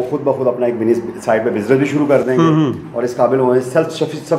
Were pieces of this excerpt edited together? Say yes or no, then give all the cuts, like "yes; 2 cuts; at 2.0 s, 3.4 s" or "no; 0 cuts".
no; 0 cuts